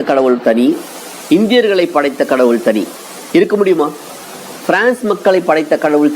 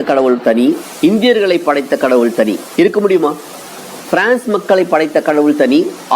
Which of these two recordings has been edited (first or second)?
second